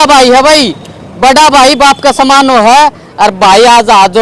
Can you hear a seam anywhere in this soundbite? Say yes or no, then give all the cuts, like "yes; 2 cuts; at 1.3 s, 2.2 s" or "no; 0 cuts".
no; 0 cuts